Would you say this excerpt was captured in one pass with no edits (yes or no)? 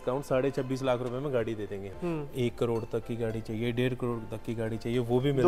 no